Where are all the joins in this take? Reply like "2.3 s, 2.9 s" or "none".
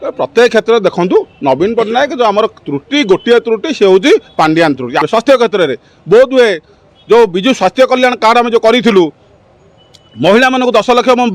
5.0 s